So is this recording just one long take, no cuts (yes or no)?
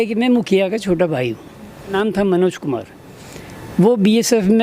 no